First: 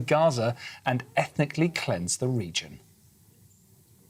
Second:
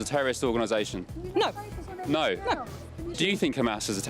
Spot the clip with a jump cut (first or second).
second